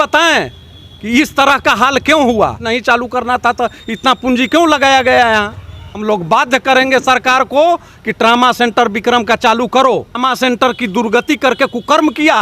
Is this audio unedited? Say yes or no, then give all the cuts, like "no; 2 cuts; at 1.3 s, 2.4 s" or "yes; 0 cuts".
no; 3 cuts; at 2.6 s, 5.6 s, 10.2 s